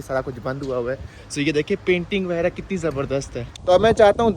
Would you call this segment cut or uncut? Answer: cut